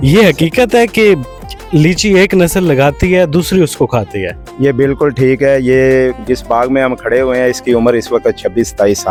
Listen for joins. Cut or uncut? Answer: uncut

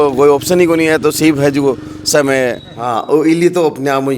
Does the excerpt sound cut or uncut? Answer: cut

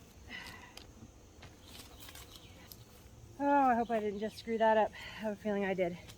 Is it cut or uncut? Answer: cut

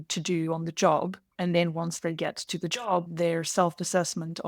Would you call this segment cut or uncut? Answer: cut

